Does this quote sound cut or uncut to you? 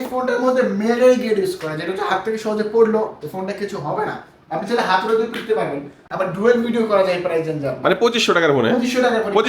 cut